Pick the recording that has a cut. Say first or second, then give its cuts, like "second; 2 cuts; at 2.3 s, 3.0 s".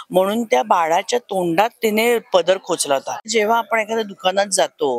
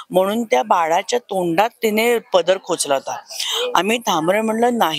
first; 1 cut; at 3.3 s